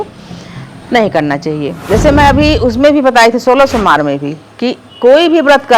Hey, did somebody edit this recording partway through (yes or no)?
yes